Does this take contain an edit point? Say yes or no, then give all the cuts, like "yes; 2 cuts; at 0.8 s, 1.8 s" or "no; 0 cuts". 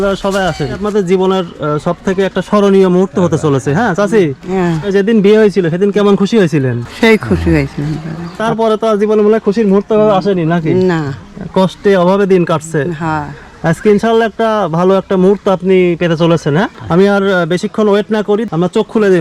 yes; 4 cuts; at 0.8 s, 8.4 s, 16.8 s, 18.4 s